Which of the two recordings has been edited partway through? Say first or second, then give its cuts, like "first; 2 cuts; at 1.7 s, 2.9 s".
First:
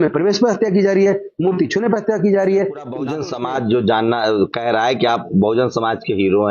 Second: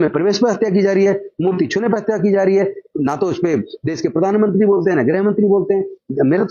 first; 1 cut; at 3.1 s